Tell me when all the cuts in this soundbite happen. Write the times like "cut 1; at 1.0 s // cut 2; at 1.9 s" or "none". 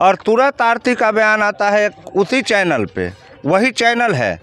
none